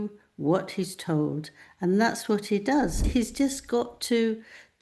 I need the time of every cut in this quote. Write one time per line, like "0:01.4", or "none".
0:03.0